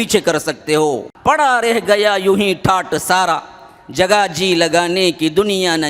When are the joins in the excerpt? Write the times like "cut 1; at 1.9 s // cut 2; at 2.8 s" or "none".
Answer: cut 1; at 1.1 s